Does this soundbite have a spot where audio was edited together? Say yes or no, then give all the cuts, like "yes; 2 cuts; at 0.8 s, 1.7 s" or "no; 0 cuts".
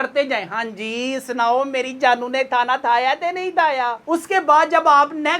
no; 0 cuts